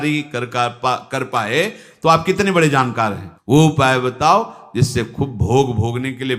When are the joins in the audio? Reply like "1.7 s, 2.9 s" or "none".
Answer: 3.2 s

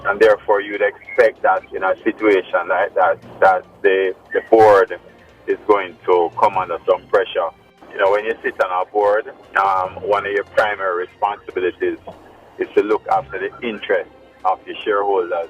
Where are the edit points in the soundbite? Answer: 7.6 s

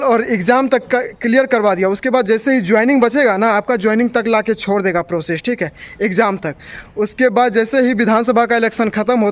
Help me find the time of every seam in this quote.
none

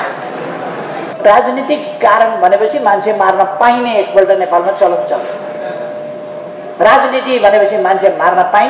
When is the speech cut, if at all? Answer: 1.1 s

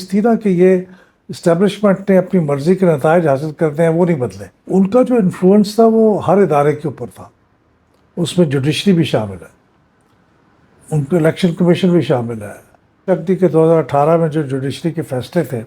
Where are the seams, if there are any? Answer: 4.6 s, 13.0 s

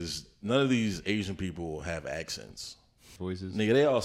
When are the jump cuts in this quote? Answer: 3.1 s

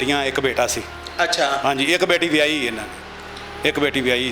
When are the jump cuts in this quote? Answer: none

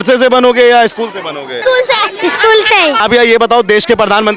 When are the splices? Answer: 1.5 s, 3.0 s

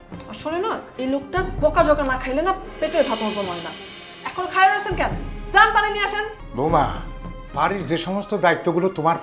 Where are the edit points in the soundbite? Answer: 6.4 s

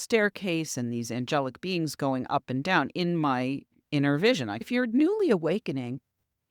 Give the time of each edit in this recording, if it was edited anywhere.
4.7 s

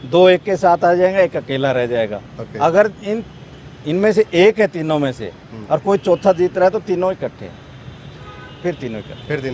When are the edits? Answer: none

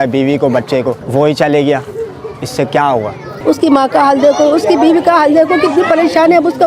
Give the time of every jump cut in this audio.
1.0 s, 3.3 s

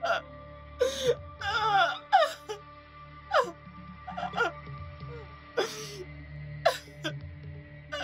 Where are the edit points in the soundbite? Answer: none

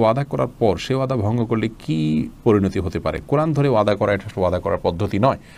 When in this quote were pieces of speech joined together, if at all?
none

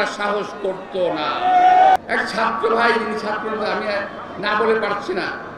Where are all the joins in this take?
2.0 s

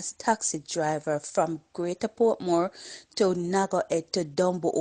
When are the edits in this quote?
none

